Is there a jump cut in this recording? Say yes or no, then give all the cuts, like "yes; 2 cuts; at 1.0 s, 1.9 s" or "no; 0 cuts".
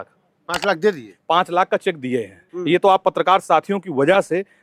yes; 1 cut; at 2.4 s